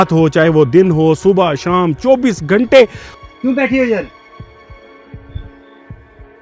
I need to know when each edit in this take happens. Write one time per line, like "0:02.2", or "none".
0:03.1